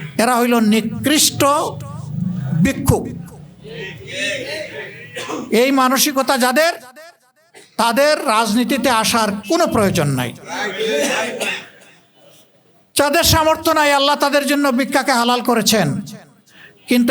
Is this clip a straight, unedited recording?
yes; 0 cuts

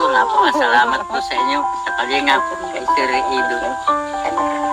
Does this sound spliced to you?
no; 0 cuts

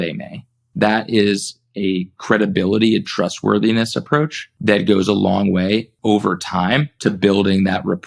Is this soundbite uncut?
no; 3 cuts; at 4.4 s, 5.9 s, 6.9 s

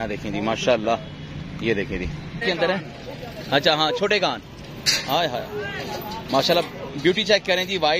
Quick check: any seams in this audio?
yes; 1 cut; at 2.4 s

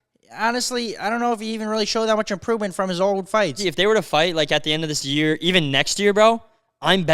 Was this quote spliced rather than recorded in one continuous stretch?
yes; 1 cut; at 3.6 s

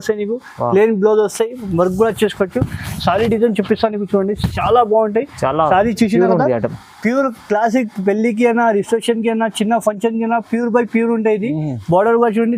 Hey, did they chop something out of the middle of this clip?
no; 0 cuts

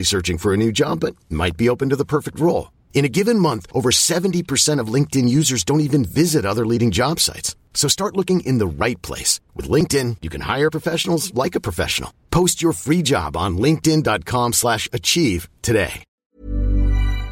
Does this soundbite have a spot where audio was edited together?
yes; 1 cut; at 16.1 s

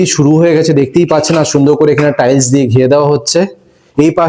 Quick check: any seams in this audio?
no; 0 cuts

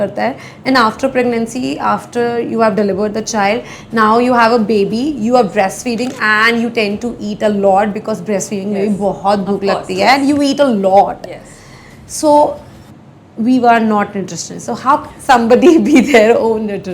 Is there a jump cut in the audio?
no; 0 cuts

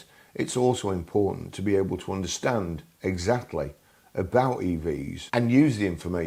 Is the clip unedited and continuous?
no; 1 cut; at 5.1 s

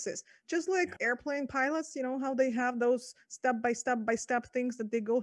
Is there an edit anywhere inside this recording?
yes; 1 cut; at 1.0 s

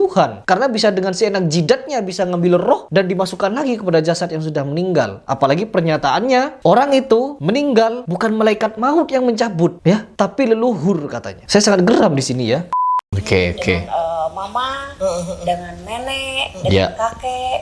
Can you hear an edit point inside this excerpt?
yes; 1 cut; at 12.7 s

